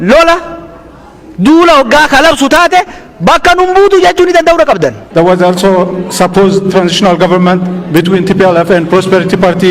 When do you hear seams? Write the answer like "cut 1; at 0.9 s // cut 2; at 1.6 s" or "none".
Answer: cut 1; at 5.0 s

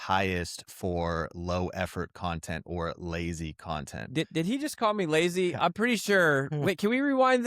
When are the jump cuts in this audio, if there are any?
cut 1; at 4.1 s

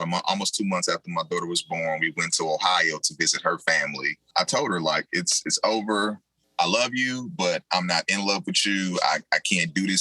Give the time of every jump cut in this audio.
cut 1; at 4.2 s

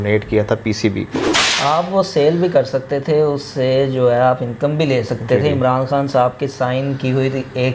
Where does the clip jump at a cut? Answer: cut 1; at 1.4 s

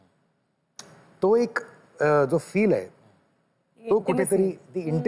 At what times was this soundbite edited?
none

